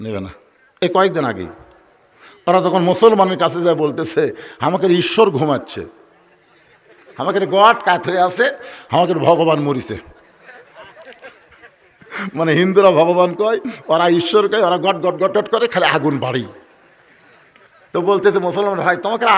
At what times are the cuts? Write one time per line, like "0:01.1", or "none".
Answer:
none